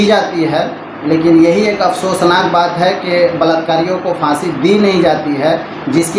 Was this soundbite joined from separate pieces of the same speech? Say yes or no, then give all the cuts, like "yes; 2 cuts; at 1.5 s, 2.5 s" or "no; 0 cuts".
no; 0 cuts